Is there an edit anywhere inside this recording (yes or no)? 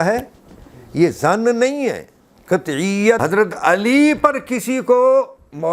yes